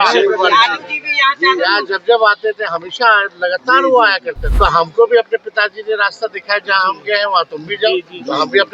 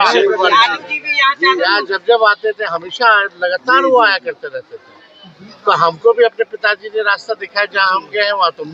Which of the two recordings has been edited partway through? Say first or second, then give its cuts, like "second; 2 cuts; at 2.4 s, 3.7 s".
first; 1 cut; at 4.4 s